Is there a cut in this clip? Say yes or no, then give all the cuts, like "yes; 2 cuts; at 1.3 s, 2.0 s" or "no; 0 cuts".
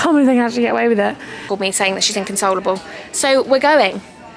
yes; 1 cut; at 1.3 s